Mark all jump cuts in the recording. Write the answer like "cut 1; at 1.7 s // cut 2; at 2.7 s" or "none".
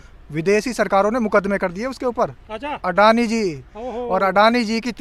none